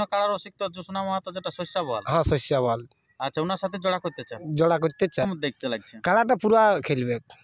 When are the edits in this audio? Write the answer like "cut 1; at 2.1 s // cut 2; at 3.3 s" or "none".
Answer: cut 1; at 5.3 s